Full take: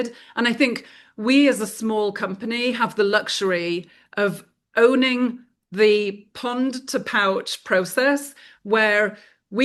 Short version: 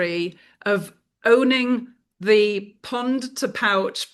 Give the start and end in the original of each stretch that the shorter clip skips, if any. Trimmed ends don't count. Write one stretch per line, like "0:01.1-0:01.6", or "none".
none